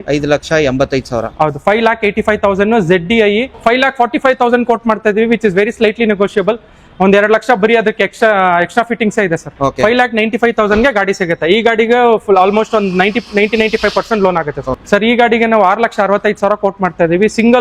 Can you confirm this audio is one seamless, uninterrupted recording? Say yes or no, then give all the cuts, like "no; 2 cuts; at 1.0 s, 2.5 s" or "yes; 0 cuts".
no; 3 cuts; at 3.5 s, 9.5 s, 14.7 s